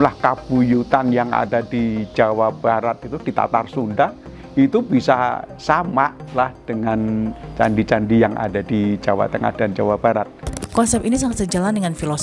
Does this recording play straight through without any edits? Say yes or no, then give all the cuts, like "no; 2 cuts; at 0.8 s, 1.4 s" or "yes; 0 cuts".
no; 1 cut; at 10.4 s